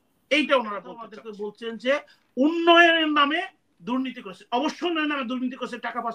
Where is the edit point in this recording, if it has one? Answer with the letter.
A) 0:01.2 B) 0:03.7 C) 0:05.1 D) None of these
A